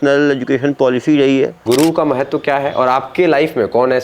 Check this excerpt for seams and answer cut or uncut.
cut